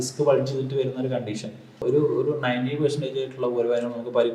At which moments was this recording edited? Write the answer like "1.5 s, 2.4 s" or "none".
1.8 s